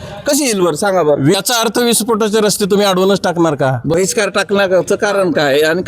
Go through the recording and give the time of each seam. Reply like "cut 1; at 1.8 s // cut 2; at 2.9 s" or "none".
cut 1; at 1.4 s // cut 2; at 3.9 s